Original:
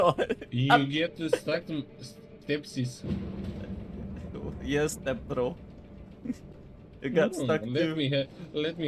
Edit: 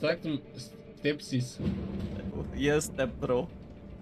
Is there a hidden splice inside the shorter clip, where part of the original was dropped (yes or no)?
yes